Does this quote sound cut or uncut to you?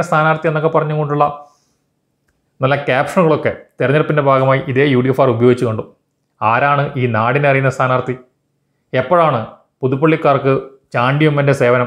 uncut